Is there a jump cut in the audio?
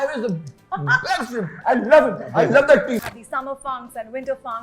yes; 1 cut; at 3.0 s

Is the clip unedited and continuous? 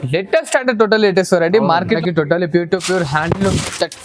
no; 1 cut; at 2.0 s

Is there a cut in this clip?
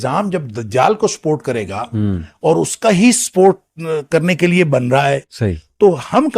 no; 0 cuts

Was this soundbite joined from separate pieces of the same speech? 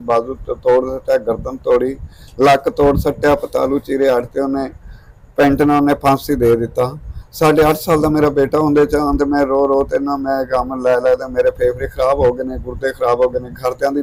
no; 0 cuts

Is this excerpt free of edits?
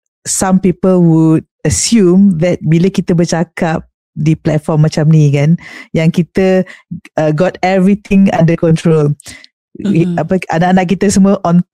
yes; 0 cuts

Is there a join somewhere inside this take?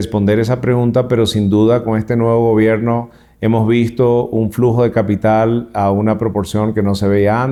no; 0 cuts

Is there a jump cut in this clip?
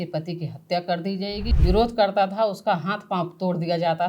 yes; 1 cut; at 1.5 s

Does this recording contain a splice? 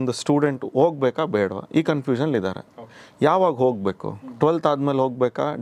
no; 0 cuts

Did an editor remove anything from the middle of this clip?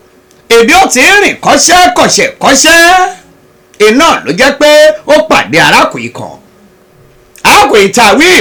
no; 0 cuts

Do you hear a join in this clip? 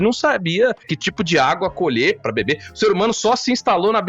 yes; 2 cuts; at 0.9 s, 2.2 s

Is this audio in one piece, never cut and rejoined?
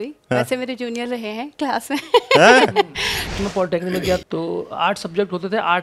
no; 2 cuts; at 3.2 s, 4.2 s

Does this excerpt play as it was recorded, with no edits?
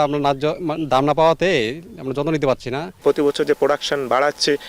no; 1 cut; at 2.9 s

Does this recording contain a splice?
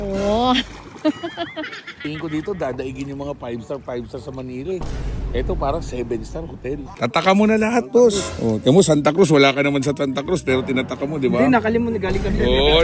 yes; 2 cuts; at 2.0 s, 6.9 s

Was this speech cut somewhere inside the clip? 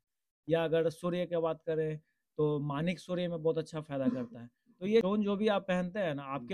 yes; 1 cut; at 5.0 s

